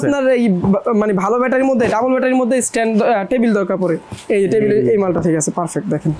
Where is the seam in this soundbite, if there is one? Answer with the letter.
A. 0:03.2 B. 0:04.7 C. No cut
C